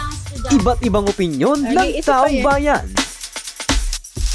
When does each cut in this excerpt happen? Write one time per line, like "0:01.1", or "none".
0:02.9